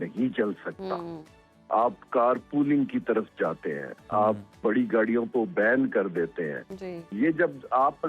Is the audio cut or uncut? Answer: uncut